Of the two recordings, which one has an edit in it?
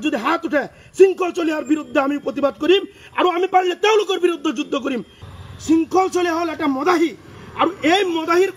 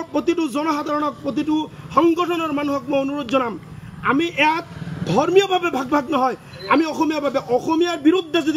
first; 1 cut; at 5.2 s

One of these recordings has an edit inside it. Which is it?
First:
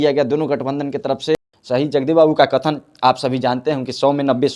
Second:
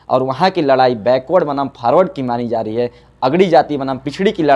first; 1 cut; at 1.4 s

